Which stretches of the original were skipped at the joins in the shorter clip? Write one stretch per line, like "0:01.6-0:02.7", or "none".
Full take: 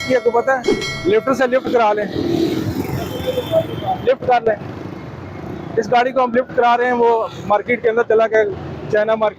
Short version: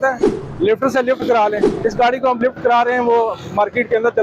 0:02.1-0:05.6

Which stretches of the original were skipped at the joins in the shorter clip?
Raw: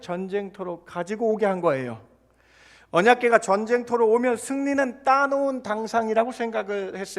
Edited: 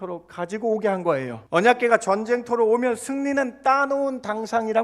0:01.9-0:02.8

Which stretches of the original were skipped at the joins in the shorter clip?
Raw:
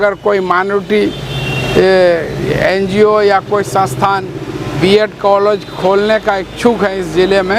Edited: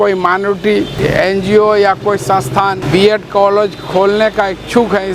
0:01.2-0:02.4
0:04.3-0:04.7

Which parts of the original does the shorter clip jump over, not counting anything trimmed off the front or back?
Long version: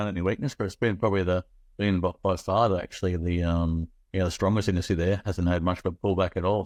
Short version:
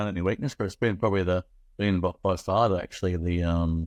none

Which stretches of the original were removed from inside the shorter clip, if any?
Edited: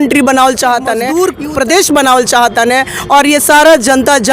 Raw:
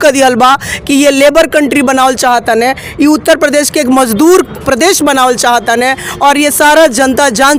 0:02.7-0:04.2

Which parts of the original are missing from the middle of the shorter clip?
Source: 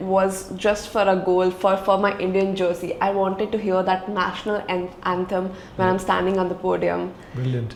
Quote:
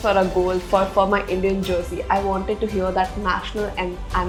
none

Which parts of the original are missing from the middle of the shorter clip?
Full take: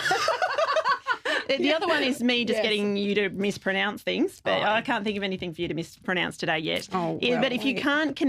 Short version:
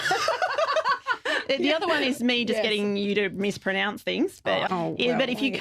0:04.7-0:06.9

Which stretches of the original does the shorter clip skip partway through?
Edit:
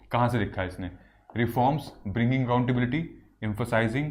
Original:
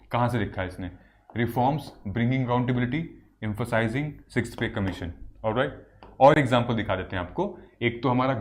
none

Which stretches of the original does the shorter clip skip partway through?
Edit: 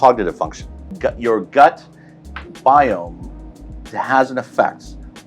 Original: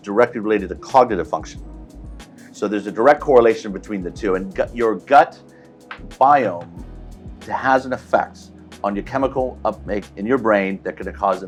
0:01.8-0:04.5

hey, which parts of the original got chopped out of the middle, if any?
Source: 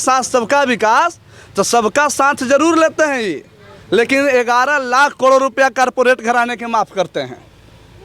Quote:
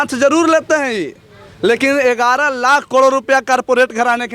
none

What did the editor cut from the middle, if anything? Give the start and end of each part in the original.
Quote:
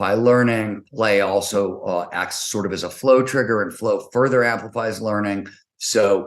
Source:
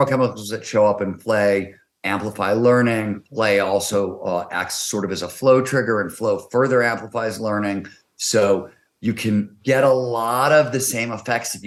none

